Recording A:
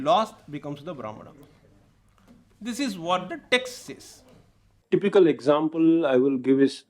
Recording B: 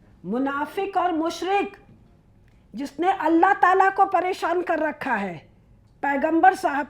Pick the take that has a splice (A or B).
A